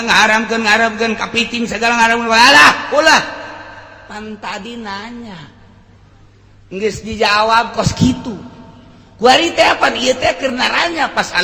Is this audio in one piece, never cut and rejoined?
yes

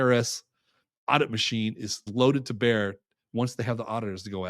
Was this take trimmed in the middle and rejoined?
yes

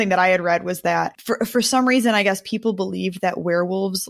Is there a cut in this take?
yes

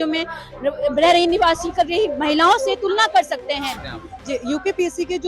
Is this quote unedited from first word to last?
no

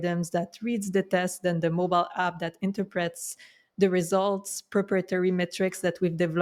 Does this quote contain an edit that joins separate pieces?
no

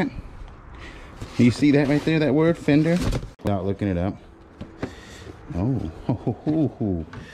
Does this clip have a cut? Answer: yes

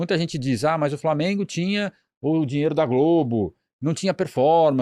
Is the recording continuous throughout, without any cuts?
yes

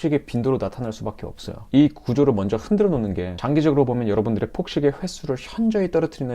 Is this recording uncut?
no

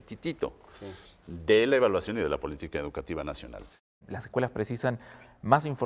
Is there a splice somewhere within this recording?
yes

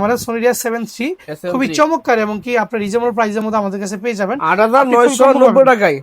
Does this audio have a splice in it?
yes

